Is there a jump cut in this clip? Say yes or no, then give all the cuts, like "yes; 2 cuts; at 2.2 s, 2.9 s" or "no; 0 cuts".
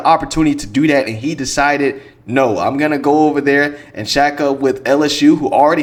no; 0 cuts